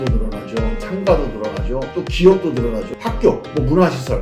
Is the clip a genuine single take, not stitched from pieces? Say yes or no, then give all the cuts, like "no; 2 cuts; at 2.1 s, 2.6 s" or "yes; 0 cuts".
no; 1 cut; at 2.9 s